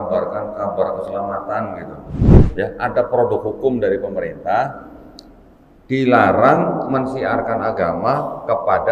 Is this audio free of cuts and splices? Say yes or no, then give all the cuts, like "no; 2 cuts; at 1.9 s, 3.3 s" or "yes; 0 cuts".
no; 1 cut; at 2.5 s